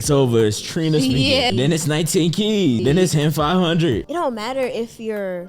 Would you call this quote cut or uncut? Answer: cut